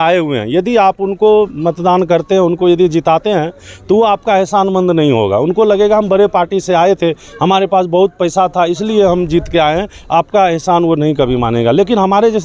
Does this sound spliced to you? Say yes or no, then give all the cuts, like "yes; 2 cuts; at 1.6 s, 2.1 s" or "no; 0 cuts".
no; 0 cuts